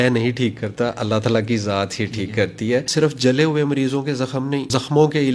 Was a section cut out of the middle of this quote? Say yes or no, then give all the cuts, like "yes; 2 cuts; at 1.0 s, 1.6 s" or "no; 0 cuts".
yes; 1 cut; at 2.9 s